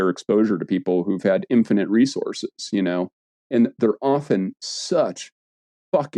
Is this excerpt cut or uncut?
uncut